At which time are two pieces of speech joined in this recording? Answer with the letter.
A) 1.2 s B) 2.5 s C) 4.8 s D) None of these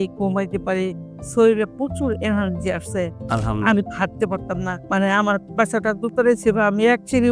C